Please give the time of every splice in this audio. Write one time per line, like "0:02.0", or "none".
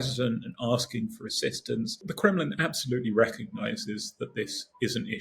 0:02.1